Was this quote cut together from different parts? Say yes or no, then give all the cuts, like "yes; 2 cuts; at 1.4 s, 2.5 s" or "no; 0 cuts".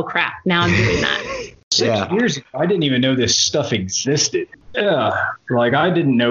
yes; 2 cuts; at 1.7 s, 4.5 s